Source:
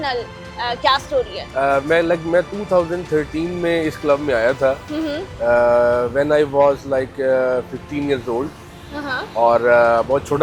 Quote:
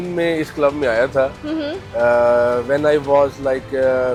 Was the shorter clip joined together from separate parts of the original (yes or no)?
no